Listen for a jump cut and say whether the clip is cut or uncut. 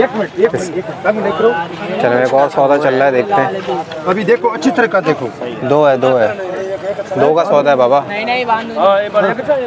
uncut